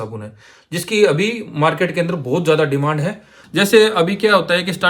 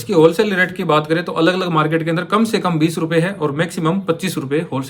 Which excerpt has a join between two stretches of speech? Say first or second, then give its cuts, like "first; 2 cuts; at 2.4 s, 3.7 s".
first; 1 cut; at 3.3 s